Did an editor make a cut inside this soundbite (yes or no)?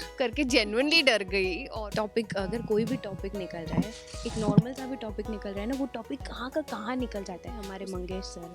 yes